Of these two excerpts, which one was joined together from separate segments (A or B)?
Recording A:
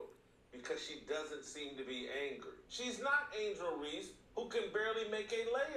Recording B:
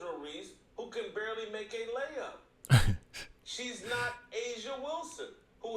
A